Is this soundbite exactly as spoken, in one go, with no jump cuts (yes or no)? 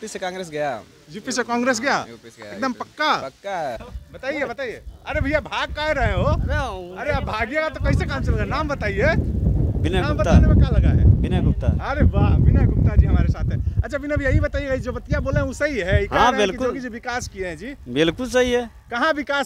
no